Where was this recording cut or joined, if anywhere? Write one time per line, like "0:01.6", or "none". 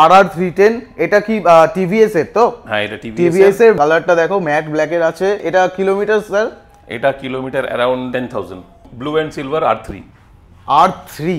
0:03.8
0:05.4
0:08.3